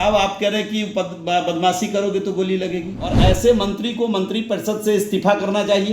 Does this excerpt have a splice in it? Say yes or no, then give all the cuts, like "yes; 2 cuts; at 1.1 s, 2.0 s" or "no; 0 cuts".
yes; 1 cut; at 3.2 s